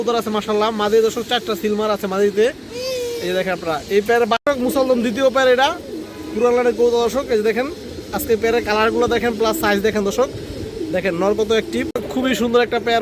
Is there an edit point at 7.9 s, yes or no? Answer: no